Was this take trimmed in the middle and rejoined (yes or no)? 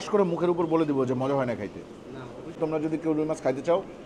yes